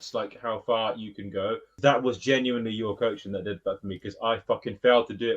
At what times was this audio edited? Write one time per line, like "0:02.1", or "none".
0:01.7